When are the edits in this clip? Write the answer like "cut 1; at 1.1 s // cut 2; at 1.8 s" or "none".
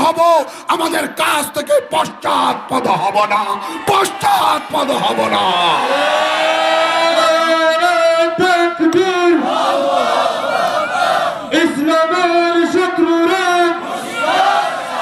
cut 1; at 7.2 s